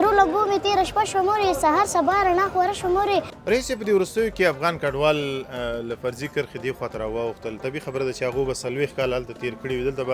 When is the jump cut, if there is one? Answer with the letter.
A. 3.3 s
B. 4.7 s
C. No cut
A